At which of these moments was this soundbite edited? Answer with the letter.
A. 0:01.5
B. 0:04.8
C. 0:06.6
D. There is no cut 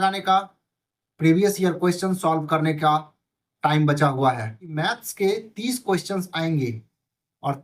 B